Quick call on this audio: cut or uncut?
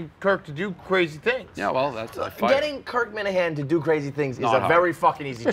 uncut